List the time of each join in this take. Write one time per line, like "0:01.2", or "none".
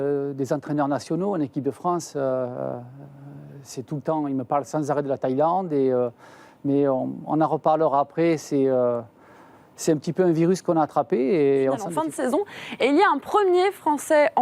0:11.9